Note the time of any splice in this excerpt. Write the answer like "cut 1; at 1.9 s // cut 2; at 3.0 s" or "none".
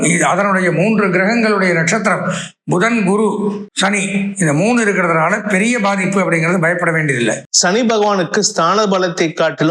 cut 1; at 3.7 s // cut 2; at 7.5 s